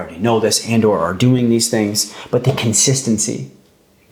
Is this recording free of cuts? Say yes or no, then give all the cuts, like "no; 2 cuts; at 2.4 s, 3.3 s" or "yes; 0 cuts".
yes; 0 cuts